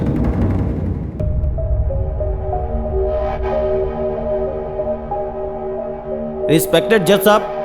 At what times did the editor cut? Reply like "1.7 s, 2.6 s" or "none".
1.1 s